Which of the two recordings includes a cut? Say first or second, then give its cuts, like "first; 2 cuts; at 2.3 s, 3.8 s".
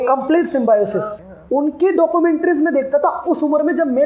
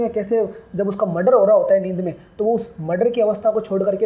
first; 1 cut; at 1.1 s